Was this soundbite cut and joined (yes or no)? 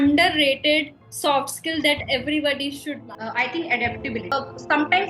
yes